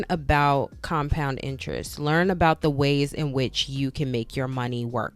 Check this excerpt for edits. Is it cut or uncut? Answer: uncut